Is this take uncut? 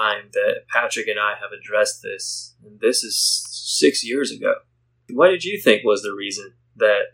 no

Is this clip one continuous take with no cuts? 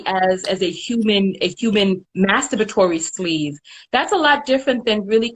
yes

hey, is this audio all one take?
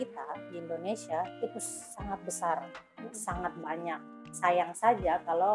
yes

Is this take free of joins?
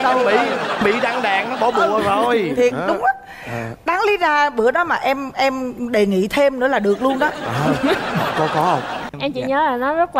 no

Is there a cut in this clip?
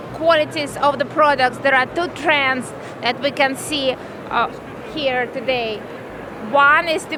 no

